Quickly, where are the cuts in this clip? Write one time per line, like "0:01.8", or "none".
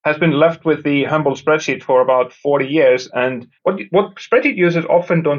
0:03.7